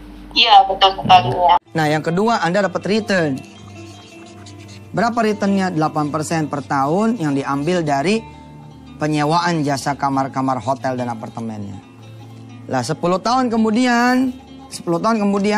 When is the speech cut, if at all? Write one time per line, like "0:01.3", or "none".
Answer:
0:01.6